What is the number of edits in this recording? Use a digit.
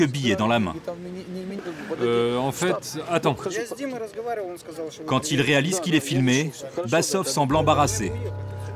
1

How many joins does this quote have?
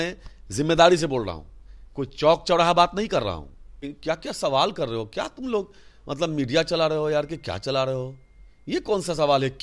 1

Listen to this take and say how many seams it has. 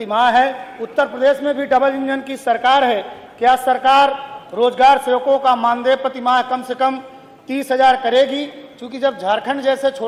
0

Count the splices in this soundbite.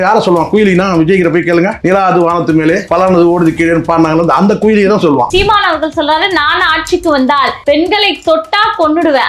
4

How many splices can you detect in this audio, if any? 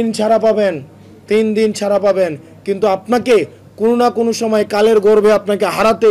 0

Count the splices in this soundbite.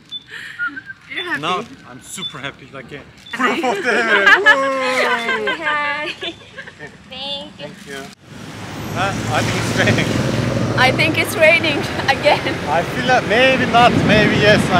2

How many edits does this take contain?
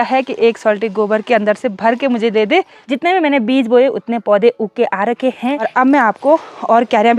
2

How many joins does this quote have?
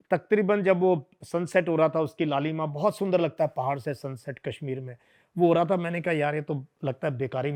0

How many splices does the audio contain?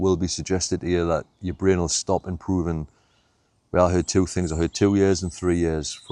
0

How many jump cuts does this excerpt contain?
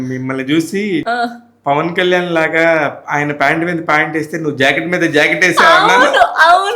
1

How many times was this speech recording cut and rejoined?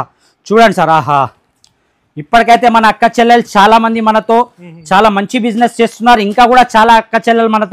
0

